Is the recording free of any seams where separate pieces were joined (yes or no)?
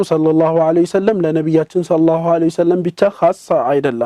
yes